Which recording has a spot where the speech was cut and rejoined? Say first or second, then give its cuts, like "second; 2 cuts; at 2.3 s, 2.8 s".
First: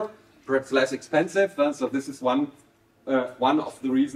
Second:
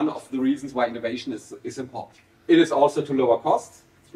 second; 1 cut; at 2.3 s